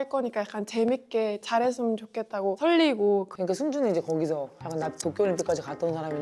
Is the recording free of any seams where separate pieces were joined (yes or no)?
no